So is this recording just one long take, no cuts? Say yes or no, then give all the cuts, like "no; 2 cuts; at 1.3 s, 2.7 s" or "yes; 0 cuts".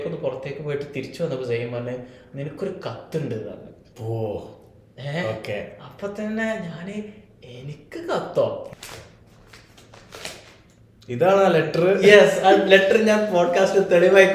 no; 1 cut; at 8.6 s